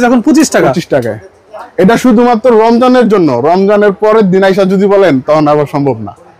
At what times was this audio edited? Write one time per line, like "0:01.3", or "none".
none